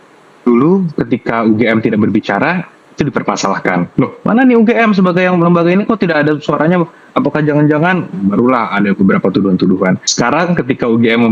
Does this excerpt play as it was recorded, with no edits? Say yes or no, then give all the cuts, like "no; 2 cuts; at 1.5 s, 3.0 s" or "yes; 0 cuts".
yes; 0 cuts